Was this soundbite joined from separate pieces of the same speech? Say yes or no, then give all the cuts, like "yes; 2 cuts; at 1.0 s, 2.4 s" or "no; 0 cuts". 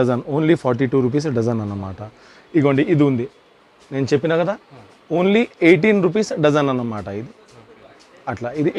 no; 0 cuts